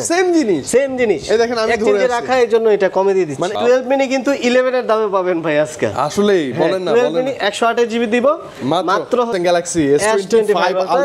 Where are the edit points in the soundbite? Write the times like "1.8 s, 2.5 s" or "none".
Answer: 3.5 s, 9.3 s